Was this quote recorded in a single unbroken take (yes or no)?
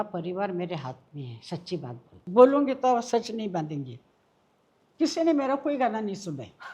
no